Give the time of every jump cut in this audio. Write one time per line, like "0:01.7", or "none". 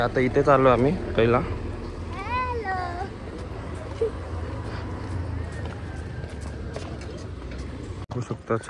none